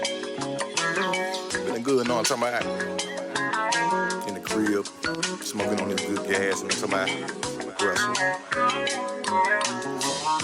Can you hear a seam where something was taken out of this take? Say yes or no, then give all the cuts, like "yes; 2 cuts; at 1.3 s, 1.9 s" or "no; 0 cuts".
no; 0 cuts